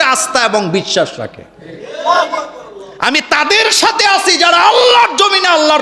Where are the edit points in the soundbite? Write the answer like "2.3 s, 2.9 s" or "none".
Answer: none